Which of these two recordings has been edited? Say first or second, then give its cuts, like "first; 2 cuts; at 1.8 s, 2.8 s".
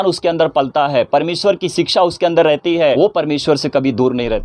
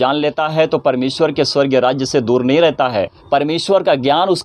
second; 1 cut; at 3.2 s